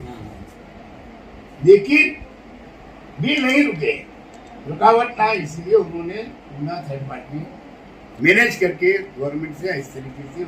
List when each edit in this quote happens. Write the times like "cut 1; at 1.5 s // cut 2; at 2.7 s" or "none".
none